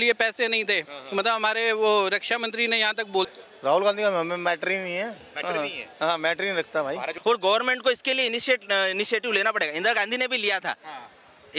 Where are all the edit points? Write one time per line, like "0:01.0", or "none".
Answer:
0:03.3
0:07.1